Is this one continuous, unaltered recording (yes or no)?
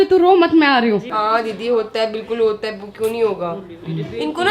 yes